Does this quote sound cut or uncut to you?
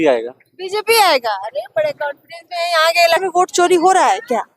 cut